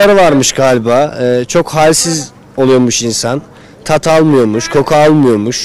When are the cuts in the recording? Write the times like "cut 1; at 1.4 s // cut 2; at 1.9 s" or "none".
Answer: none